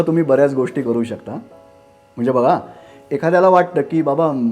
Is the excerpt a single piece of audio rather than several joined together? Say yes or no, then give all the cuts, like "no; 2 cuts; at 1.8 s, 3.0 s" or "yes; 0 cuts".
yes; 0 cuts